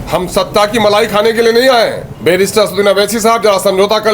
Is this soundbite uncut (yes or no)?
no